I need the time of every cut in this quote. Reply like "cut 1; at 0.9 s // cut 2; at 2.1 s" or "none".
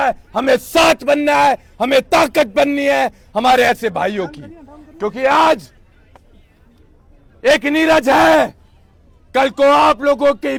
none